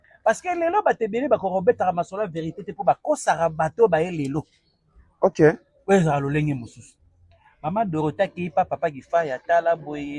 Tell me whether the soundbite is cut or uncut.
uncut